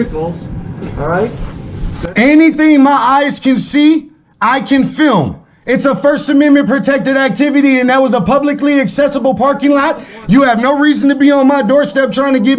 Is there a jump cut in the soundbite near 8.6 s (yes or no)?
no